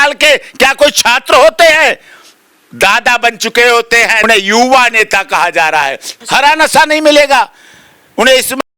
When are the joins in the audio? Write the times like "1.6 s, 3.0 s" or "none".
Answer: 4.3 s, 6.1 s